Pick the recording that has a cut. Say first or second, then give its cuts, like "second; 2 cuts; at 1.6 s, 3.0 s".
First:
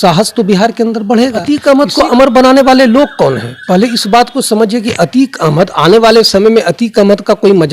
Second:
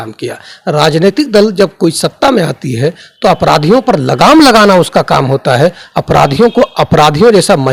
first; 1 cut; at 1.4 s